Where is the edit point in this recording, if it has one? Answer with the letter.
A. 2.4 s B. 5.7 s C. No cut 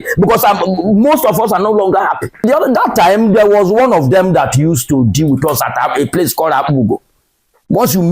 A